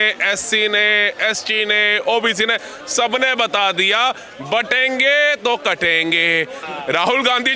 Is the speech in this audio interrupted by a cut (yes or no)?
yes